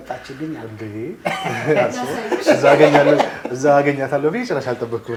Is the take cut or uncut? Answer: uncut